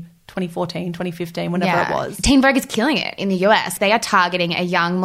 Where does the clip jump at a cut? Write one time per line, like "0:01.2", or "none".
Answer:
0:02.1
0:03.7